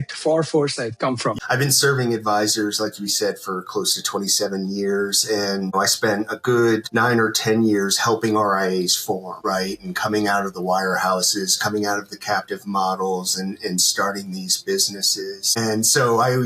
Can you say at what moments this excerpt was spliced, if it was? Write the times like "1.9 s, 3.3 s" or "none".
1.4 s, 5.7 s